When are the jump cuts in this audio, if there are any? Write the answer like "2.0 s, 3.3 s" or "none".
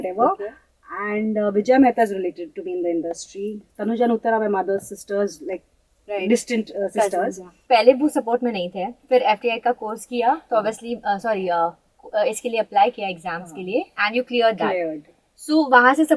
7.5 s

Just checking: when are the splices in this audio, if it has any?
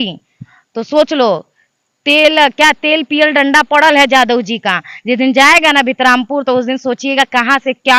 none

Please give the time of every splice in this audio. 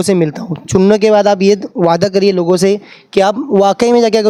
none

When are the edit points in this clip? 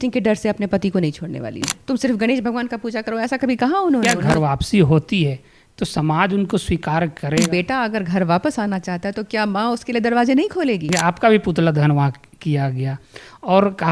1.8 s, 4.1 s, 7.4 s, 10.9 s

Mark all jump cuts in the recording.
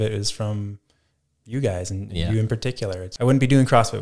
3.1 s

